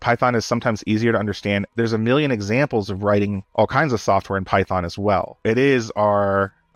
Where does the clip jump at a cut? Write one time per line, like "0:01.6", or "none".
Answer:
0:03.4